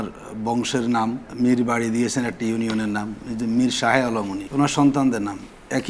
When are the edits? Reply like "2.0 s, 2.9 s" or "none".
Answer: 1.2 s, 4.4 s

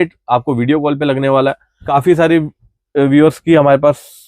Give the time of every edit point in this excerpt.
1.7 s

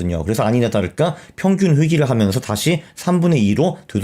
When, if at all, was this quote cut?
none

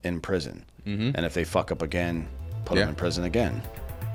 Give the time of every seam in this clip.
none

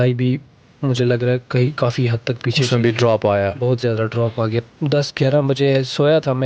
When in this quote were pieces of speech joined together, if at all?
4.6 s

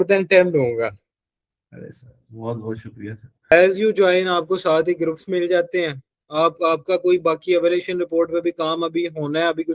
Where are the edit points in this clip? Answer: 3.4 s

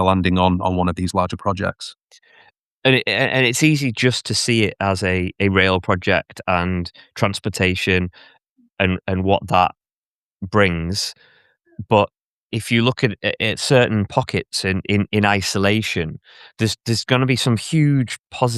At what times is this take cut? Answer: none

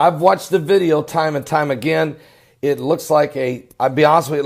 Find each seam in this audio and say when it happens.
1.8 s

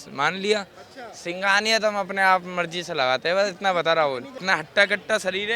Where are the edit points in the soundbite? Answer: 4.3 s

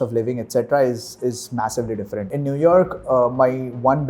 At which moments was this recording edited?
2.3 s

